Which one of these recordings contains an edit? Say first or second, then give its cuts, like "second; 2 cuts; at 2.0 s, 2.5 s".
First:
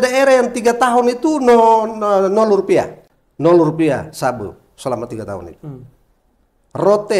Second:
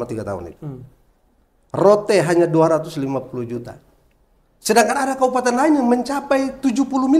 first; 1 cut; at 3.0 s